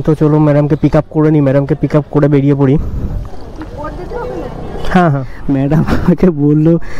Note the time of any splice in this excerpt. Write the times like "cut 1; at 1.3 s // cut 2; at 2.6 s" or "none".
cut 1; at 5.3 s